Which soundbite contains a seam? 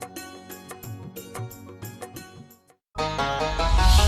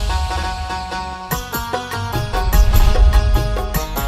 first; 1 cut; at 2.9 s

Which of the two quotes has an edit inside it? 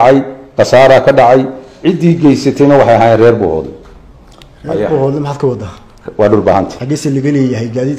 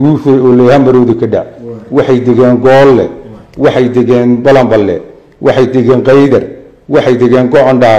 first; 1 cut; at 6.8 s

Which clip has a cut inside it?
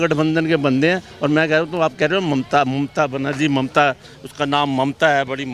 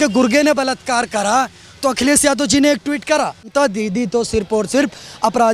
second; 1 cut; at 3.4 s

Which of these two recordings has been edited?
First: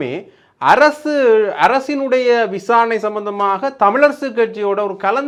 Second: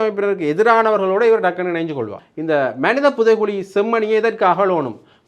second; 1 cut; at 2.3 s

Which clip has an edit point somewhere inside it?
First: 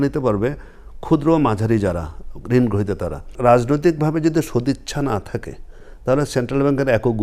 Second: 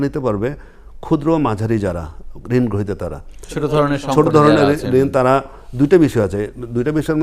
first; 1 cut; at 3.4 s

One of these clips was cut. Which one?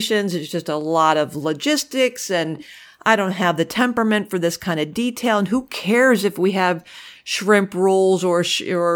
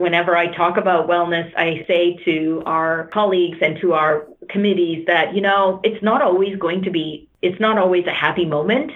second; 3 cuts; at 1.8 s, 3.1 s, 7.2 s

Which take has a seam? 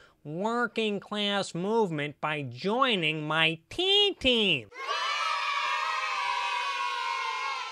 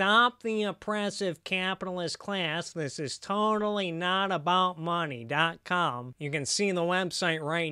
second; 1 cut; at 6.1 s

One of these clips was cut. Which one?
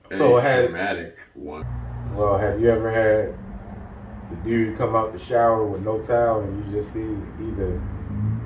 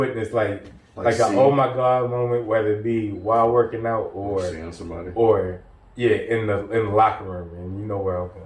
first; 1 cut; at 1.6 s

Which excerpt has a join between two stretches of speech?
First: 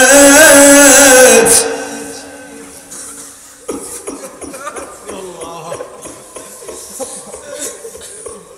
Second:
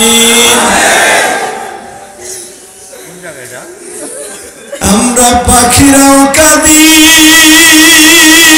second; 1 cut; at 4.8 s

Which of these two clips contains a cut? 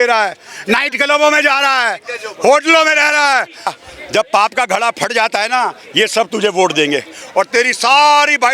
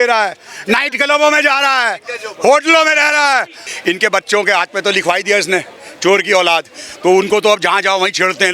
second; 1 cut; at 3.7 s

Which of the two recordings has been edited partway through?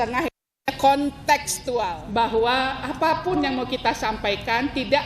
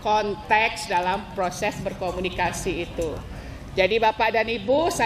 first; 1 cut; at 2.0 s

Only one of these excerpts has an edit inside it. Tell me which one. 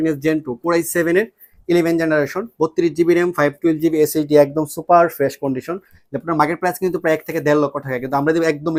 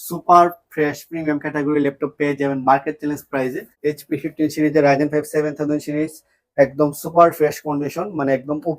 second; 1 cut; at 3.6 s

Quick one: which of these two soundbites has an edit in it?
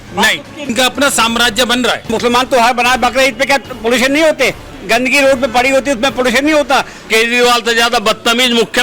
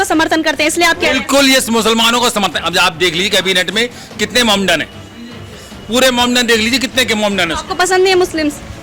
first; 3 cuts; at 0.7 s, 2.1 s, 7.0 s

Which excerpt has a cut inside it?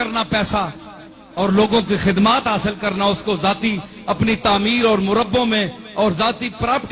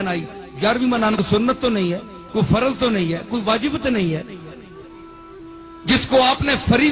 second; 1 cut; at 1.1 s

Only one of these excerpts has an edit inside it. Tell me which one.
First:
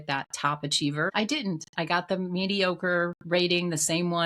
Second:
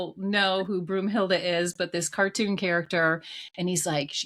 first; 1 cut; at 1.1 s

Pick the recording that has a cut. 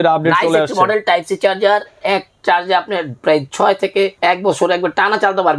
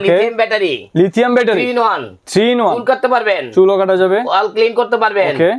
first; 1 cut; at 4.1 s

